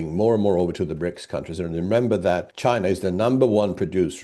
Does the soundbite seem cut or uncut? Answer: uncut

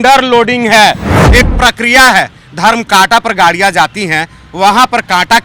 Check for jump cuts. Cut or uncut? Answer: cut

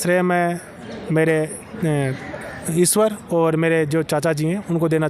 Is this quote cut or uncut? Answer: uncut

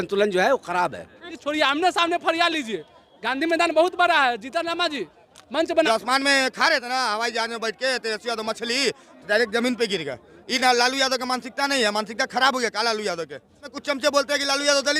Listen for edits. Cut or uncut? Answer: cut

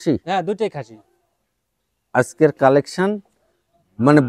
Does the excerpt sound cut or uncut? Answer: uncut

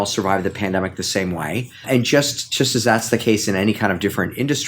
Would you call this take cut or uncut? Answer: cut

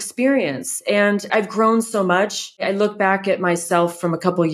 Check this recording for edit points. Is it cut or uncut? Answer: cut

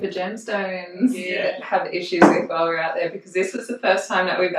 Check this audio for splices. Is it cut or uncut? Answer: cut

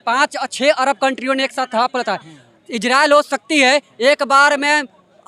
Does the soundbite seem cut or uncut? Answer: uncut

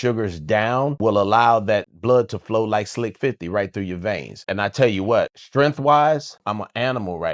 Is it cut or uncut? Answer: cut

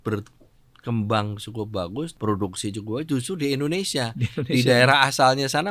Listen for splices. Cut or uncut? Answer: cut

